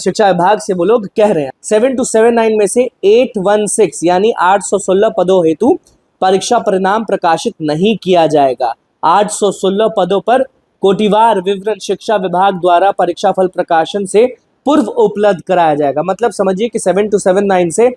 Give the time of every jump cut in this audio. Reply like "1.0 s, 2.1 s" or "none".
1.5 s